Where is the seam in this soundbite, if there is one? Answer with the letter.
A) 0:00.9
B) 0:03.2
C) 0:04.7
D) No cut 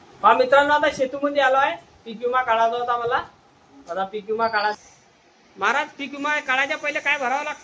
C